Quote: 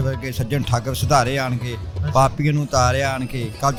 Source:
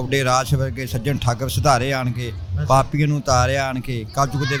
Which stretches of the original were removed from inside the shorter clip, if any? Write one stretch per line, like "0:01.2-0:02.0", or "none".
none